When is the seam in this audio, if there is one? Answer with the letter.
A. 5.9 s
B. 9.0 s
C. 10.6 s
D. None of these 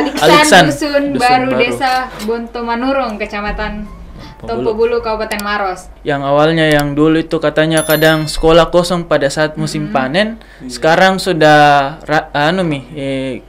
A